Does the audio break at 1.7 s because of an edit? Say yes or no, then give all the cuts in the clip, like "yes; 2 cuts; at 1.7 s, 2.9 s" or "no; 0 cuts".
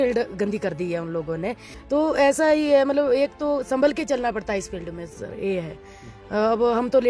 yes; 1 cut; at 1.7 s